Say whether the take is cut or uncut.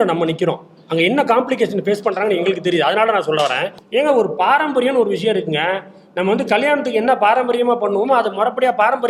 cut